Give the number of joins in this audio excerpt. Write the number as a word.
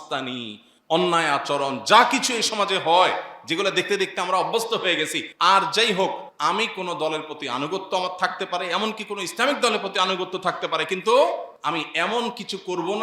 three